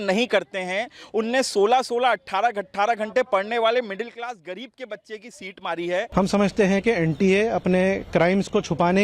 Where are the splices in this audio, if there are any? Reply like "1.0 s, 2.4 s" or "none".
6.1 s